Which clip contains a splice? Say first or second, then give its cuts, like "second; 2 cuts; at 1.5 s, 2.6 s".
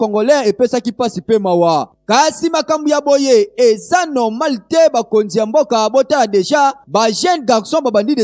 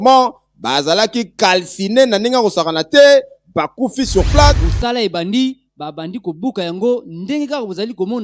second; 1 cut; at 4.7 s